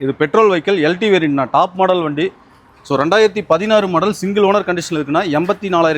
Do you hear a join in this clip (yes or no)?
no